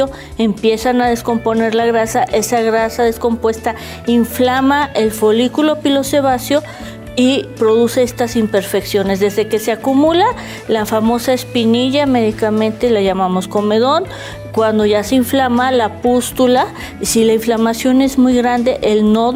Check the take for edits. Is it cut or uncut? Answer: uncut